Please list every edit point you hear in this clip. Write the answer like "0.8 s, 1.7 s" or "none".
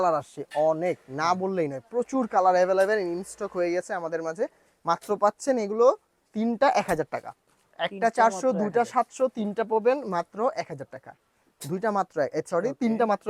none